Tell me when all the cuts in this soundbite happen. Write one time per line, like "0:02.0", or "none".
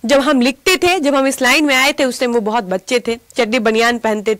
none